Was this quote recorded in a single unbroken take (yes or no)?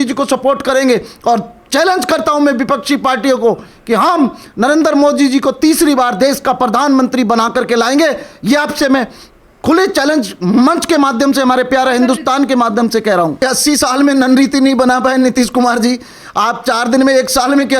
no